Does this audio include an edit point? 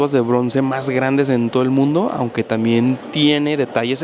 no; 0 cuts

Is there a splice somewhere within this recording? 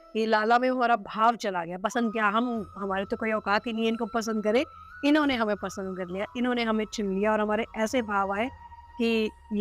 no; 0 cuts

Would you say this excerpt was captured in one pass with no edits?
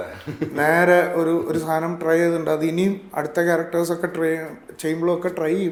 yes; 0 cuts

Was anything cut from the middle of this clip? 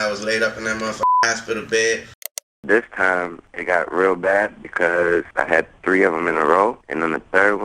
yes; 1 cut; at 2.4 s

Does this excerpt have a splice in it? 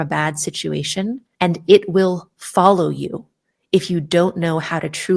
yes; 1 cut; at 1.3 s

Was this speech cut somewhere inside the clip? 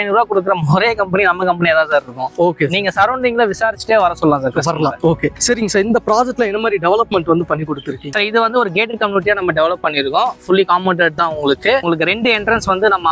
no; 0 cuts

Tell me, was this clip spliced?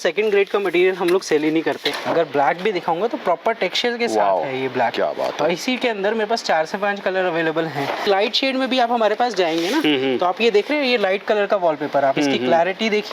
yes; 2 cuts; at 1.9 s, 8.1 s

